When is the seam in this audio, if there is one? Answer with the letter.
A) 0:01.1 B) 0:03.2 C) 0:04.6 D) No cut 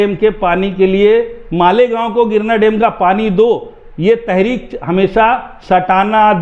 D